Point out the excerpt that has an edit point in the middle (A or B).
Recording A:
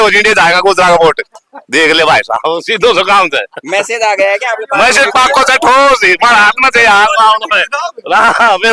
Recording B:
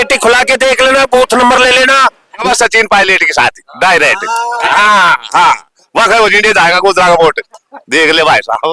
B